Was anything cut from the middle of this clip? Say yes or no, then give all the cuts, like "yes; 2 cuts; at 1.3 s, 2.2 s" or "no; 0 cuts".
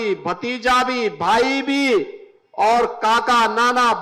no; 0 cuts